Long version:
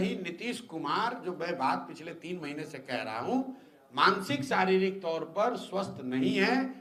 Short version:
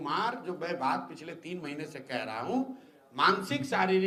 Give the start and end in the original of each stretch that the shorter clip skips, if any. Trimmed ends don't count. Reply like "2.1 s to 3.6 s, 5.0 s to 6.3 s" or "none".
none